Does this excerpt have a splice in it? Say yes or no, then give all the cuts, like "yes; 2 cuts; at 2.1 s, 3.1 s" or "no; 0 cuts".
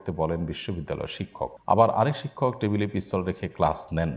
yes; 1 cut; at 1.6 s